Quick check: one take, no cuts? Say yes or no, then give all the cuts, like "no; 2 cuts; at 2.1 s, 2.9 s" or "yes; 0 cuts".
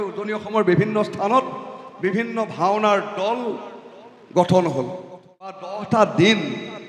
no; 1 cut; at 5.6 s